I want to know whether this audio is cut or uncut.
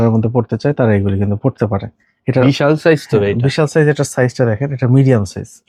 uncut